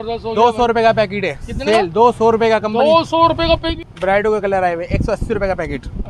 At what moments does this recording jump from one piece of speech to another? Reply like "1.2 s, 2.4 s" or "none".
3.8 s